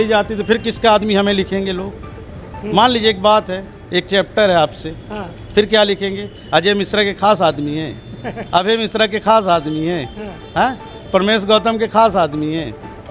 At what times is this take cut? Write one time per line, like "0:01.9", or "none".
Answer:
none